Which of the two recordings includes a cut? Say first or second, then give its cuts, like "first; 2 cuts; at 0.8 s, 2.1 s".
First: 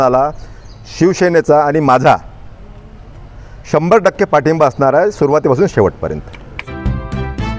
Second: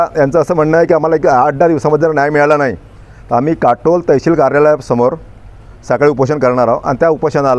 first; 1 cut; at 6.4 s